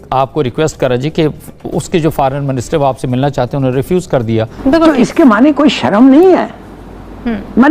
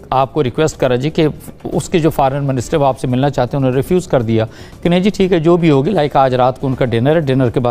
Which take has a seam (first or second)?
first